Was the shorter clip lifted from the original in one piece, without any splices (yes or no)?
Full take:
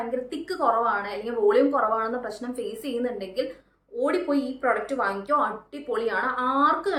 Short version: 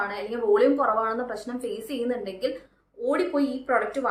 yes